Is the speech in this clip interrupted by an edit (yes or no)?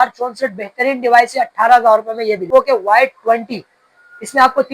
yes